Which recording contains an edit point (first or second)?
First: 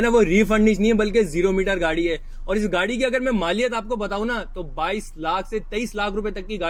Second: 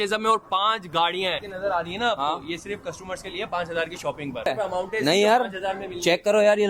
second